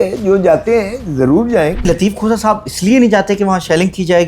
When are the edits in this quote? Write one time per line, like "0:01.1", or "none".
0:01.9